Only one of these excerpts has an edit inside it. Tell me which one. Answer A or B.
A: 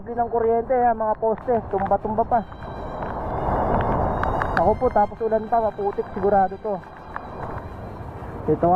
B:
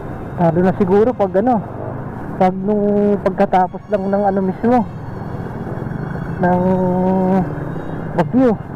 A